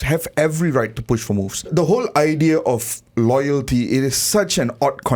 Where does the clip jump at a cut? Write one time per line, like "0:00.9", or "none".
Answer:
0:01.7